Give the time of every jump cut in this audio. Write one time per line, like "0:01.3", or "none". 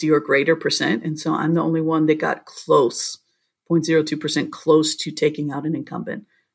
none